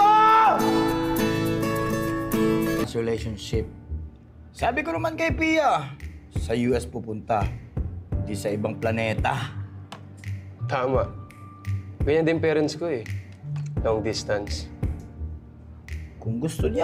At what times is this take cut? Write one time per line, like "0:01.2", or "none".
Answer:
0:02.8